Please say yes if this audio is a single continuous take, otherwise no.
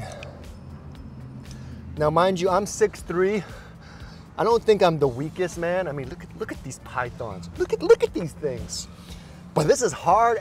yes